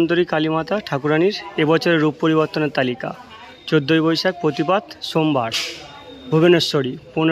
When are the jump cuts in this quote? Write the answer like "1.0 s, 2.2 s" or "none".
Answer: none